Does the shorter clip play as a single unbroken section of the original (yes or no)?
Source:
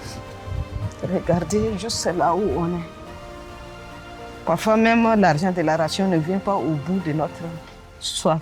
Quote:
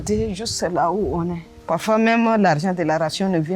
no